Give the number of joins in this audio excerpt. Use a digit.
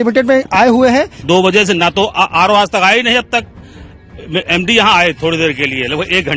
1